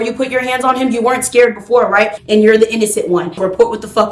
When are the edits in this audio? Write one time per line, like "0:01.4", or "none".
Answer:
0:02.2
0:03.3